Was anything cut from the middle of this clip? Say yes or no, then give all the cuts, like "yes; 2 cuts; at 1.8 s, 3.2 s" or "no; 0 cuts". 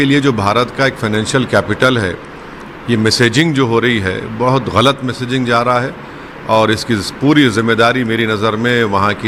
no; 0 cuts